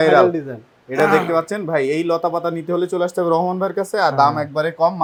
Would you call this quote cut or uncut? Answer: uncut